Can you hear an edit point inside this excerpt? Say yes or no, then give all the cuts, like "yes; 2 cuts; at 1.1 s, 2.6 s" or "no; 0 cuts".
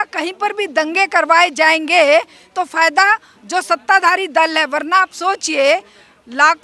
no; 0 cuts